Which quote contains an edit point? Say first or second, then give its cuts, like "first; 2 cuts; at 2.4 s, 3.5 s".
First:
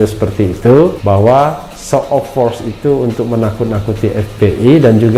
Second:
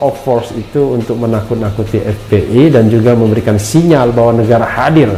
first; 1 cut; at 1.0 s